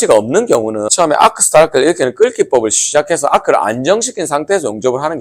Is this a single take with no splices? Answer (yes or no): no